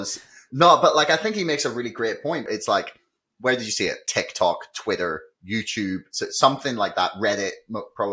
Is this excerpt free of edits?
no; 1 cut; at 2.5 s

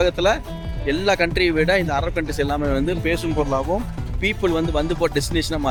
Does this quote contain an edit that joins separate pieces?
no; 0 cuts

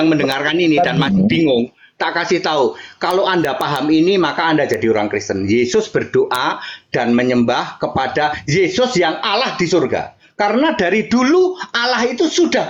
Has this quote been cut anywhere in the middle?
no; 0 cuts

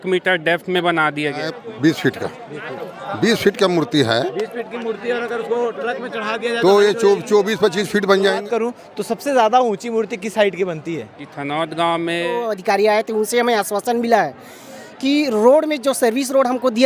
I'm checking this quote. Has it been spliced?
yes; 3 cuts; at 1.4 s, 8.5 s, 12.4 s

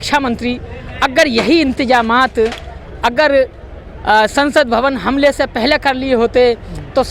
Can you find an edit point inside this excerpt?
no; 0 cuts

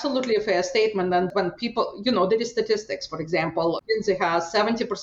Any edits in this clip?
yes; 2 cuts; at 1.3 s, 3.8 s

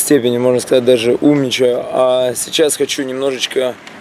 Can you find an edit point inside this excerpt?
no; 0 cuts

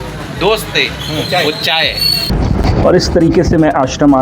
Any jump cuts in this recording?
yes; 1 cut; at 2.2 s

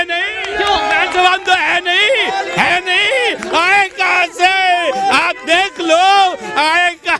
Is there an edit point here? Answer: no; 0 cuts

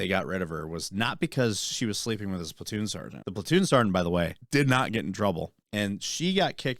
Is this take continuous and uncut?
no; 3 cuts; at 3.1 s, 4.4 s, 5.6 s

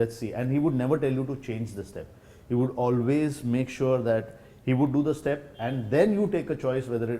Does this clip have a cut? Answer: no; 0 cuts

